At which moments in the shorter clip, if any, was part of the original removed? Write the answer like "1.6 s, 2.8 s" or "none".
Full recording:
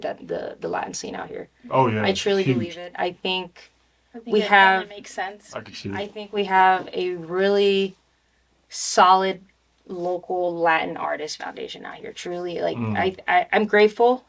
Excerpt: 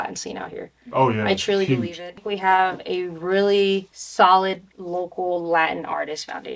2.1 s, 4.0 s, 4.7 s

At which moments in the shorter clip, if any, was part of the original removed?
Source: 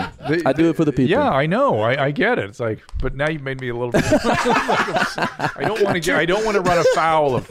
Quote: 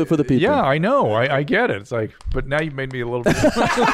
none

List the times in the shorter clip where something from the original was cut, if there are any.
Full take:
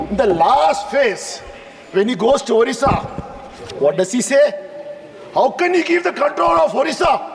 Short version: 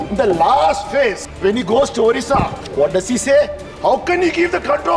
1.3 s, 2.6 s, 3.6 s

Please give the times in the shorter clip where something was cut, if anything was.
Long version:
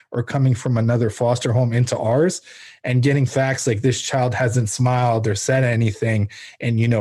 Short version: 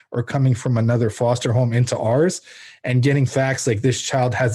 none

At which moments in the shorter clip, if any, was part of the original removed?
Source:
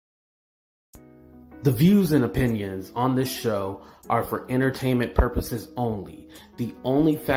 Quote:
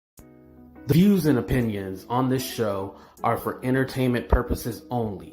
0.9 s

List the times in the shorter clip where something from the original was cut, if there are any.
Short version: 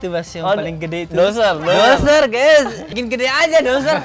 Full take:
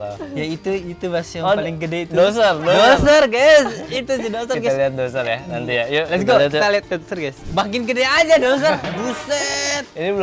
3.0 s

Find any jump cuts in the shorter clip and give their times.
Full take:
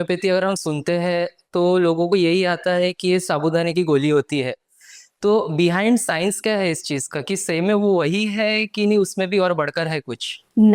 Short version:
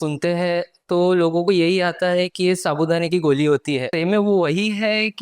3.9 s

